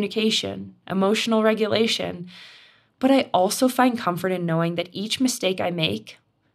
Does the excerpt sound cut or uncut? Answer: uncut